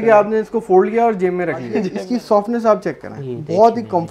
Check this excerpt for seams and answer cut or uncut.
cut